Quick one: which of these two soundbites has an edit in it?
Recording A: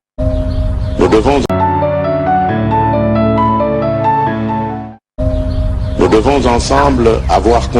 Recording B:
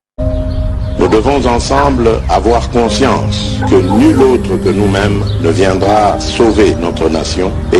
B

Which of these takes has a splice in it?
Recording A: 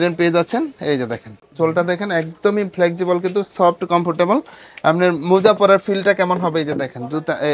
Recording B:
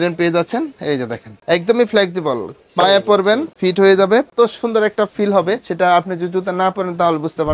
B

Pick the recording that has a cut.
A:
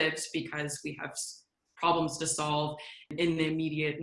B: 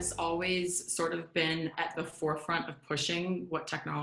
A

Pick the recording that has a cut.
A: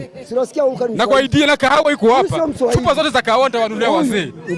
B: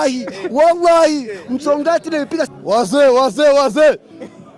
B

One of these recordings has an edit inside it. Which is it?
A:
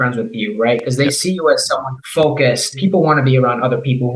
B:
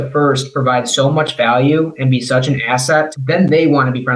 A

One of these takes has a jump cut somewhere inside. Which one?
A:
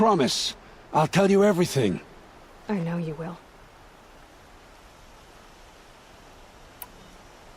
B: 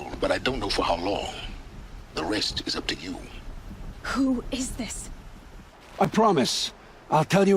B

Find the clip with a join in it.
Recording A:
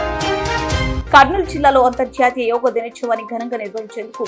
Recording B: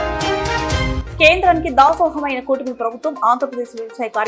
A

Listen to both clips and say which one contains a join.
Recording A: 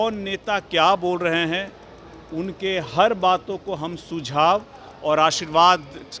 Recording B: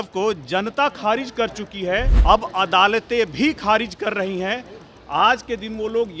B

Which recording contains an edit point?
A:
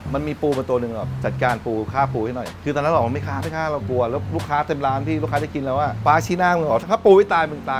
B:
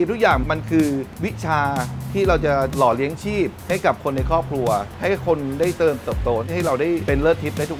B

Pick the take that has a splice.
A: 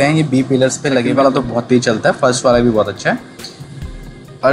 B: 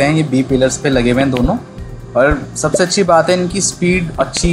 A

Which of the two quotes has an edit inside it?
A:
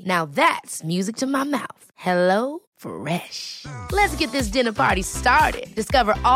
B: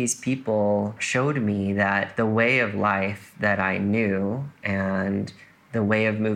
B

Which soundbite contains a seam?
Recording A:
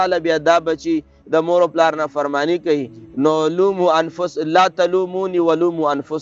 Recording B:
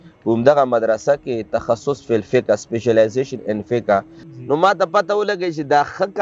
B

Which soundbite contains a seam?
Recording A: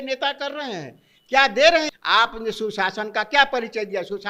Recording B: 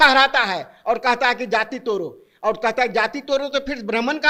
A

